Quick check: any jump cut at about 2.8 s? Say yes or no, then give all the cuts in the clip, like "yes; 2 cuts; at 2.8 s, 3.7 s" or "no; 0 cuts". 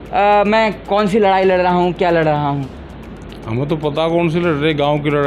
no; 0 cuts